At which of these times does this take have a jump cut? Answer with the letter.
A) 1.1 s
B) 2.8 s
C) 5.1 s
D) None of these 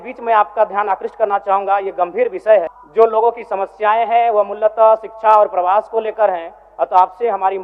B